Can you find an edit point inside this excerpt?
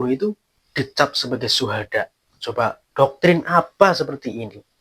no; 0 cuts

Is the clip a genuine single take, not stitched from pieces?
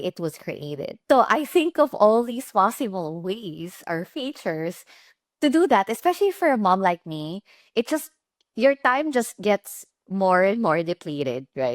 no; 1 cut; at 0.9 s

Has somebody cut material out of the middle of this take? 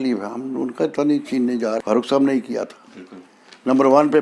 yes; 1 cut; at 1.8 s

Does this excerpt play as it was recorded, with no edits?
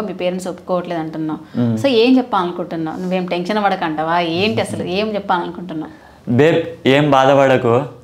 yes; 0 cuts

